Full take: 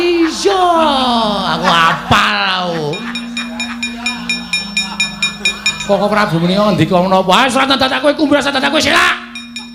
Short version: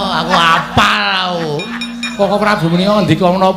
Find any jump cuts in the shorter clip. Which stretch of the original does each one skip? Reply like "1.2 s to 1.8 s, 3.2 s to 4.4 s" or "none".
3.4 s to 5.8 s